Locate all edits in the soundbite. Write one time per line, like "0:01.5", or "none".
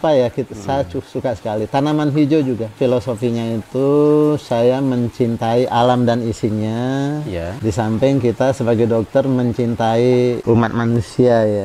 0:02.7